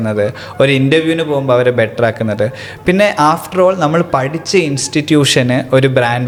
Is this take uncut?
yes; 0 cuts

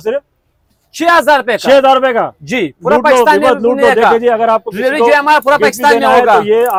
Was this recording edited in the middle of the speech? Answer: no; 0 cuts

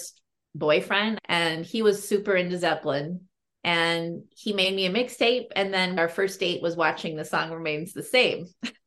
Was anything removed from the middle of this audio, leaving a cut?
yes; 2 cuts; at 1.2 s, 6.0 s

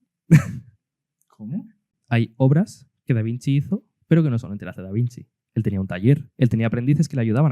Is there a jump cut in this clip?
yes; 3 cuts; at 1.9 s, 3.9 s, 6.3 s

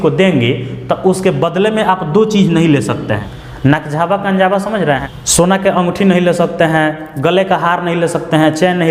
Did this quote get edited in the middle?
yes; 2 cuts; at 3.2 s, 5.1 s

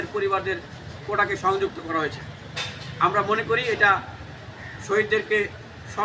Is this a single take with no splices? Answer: yes; 0 cuts

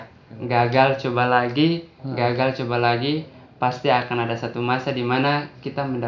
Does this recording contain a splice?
no; 0 cuts

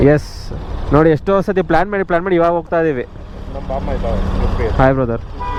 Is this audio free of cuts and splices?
yes; 0 cuts

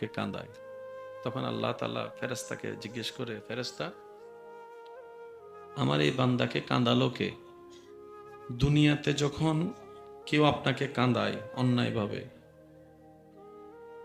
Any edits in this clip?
yes; 2 cuts; at 4.4 s, 5.7 s

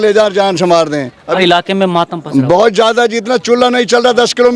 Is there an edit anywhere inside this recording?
yes; 1 cut; at 1.3 s

